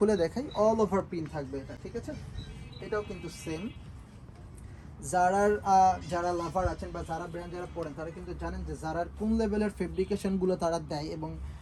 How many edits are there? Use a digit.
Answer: 0